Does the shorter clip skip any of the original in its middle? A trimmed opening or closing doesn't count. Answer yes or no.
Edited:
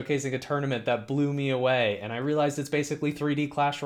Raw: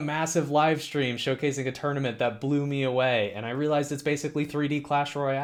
no